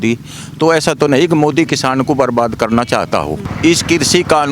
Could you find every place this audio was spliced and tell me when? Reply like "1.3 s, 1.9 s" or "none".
3.5 s